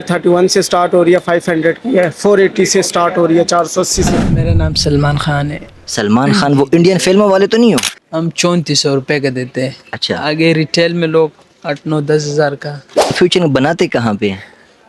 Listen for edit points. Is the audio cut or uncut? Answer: cut